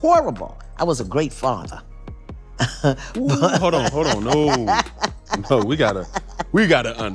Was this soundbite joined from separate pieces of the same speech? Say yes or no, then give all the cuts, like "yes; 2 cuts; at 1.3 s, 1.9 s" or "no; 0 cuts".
no; 0 cuts